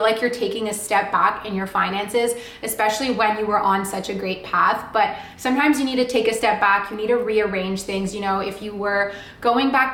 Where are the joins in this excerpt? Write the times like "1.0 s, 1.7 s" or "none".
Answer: none